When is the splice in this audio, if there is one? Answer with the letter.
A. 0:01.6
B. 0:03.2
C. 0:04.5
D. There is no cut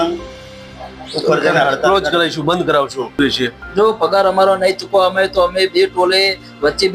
B